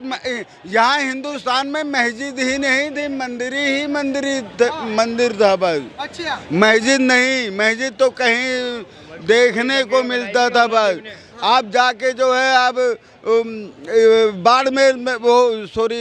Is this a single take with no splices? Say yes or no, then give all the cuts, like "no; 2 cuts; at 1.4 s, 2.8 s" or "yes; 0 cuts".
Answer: yes; 0 cuts